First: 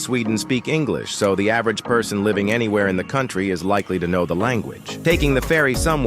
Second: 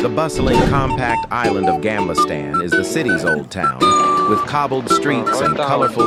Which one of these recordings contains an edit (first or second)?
first